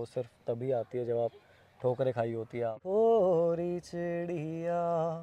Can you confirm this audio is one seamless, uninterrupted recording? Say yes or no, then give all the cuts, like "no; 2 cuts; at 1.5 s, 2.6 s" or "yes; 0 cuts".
no; 1 cut; at 2.8 s